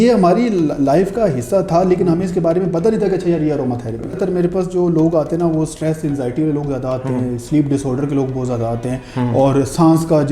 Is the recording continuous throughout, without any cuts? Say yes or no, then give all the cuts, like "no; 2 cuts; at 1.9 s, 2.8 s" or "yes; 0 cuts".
no; 1 cut; at 4.2 s